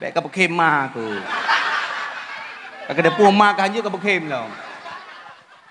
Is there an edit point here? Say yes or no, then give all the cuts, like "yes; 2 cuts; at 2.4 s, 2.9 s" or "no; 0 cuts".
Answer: no; 0 cuts